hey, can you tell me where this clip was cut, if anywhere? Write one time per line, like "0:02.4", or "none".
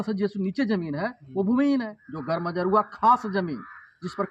0:01.8

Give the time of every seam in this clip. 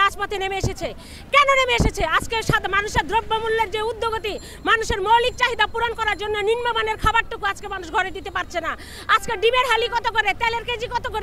none

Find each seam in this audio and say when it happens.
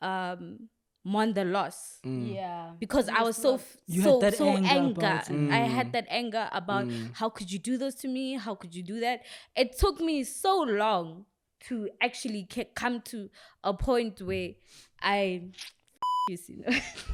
none

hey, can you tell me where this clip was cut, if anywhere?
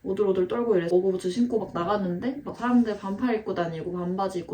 0:00.9
0:02.5

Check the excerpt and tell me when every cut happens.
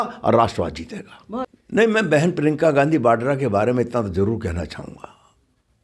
0:01.5

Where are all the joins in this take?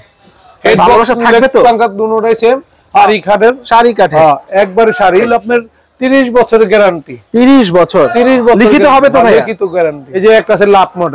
0:03.1
0:05.3
0:10.0

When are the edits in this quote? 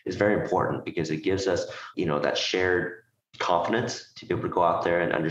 0:01.9

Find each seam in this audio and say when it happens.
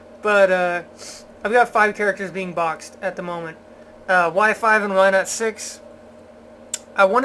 0:04.6

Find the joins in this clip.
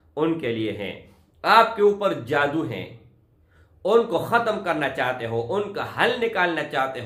none

